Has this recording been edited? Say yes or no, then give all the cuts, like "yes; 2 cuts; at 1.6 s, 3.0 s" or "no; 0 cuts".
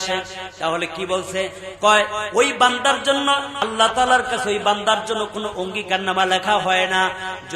yes; 1 cut; at 3.5 s